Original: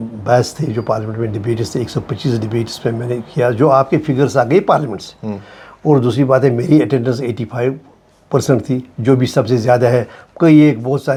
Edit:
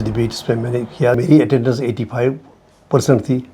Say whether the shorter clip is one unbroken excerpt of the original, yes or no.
no